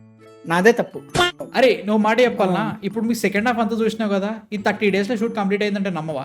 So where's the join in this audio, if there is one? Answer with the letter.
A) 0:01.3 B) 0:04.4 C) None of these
A